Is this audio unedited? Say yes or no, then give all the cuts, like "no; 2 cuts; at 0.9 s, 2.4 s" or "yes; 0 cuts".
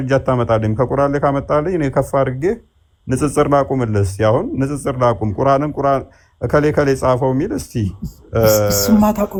yes; 0 cuts